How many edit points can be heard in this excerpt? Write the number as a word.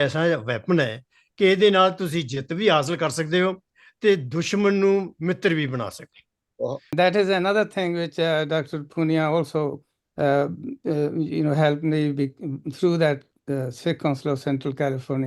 one